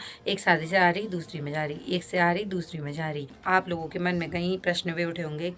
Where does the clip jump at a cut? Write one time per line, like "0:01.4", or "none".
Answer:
0:03.3